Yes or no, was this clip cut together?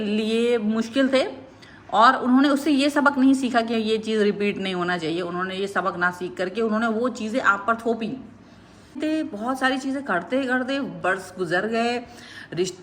yes